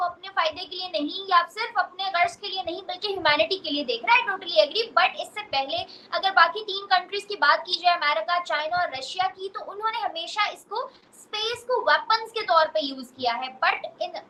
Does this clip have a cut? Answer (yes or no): no